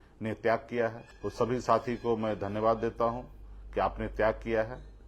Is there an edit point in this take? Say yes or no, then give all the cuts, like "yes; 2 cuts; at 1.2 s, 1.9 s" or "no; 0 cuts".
yes; 1 cut; at 1.1 s